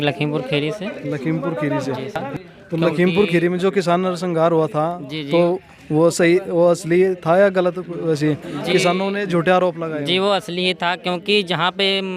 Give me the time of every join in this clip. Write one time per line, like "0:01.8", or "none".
0:02.3